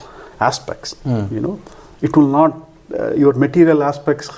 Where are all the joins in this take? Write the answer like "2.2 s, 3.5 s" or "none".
none

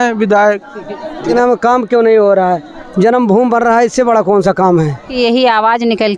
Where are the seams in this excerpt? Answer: 1.3 s, 5.1 s

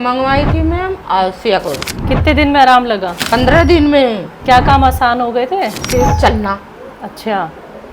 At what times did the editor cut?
1.9 s, 3.1 s, 4.3 s, 5.8 s

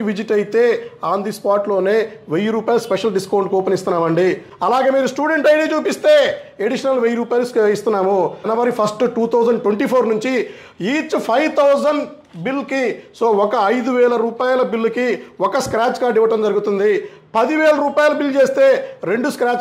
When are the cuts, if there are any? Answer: 4.5 s, 8.4 s

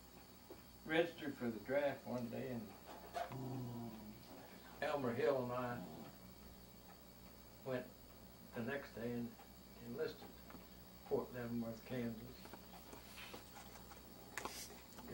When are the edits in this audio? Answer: none

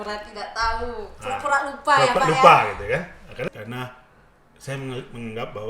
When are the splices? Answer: 3.5 s

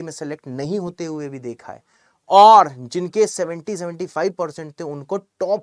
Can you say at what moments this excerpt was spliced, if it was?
none

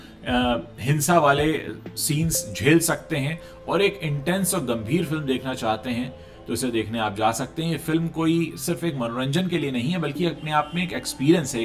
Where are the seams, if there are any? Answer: none

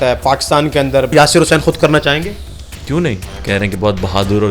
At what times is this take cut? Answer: 1.1 s, 3.3 s

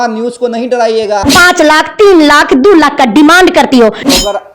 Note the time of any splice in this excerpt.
1.2 s

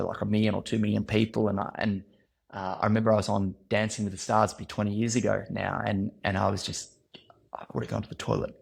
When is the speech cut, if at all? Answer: none

